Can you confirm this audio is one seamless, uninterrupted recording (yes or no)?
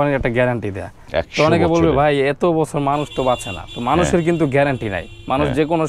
yes